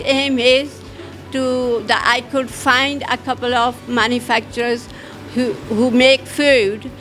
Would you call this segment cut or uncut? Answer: uncut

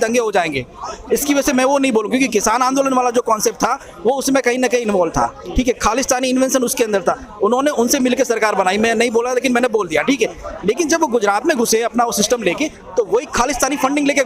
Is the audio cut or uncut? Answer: uncut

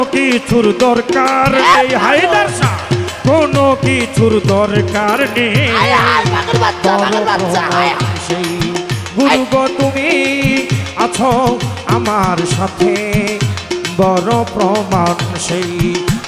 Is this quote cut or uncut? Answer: uncut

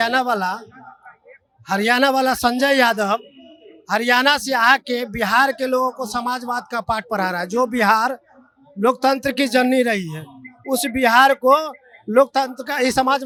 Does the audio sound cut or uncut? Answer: uncut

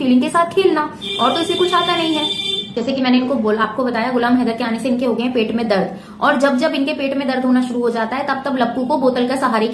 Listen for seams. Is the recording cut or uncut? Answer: uncut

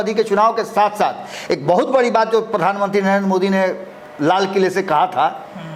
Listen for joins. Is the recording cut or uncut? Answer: uncut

